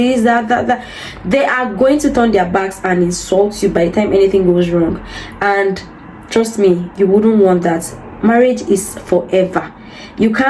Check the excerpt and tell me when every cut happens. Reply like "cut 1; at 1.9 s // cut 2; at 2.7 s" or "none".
none